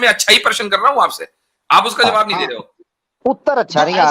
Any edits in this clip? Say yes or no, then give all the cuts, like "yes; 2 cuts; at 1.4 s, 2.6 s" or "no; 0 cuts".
no; 0 cuts